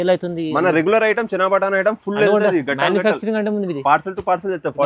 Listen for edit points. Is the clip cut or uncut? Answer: uncut